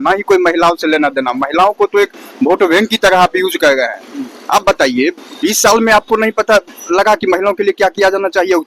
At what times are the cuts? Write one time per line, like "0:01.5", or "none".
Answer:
none